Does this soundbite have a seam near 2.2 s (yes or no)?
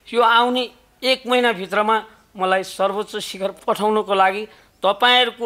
no